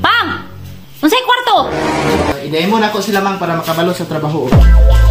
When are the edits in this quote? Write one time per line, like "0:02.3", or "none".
none